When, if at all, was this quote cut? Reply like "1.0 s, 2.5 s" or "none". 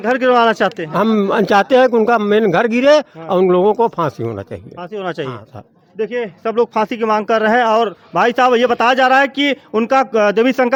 none